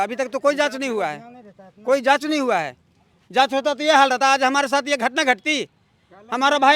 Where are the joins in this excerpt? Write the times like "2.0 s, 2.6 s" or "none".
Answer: none